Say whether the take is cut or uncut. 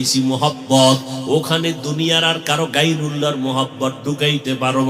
uncut